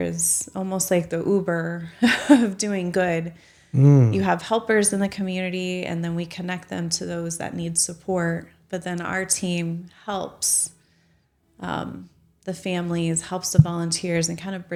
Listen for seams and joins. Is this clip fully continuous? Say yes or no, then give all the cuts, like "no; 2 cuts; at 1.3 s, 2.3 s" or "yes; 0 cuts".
yes; 0 cuts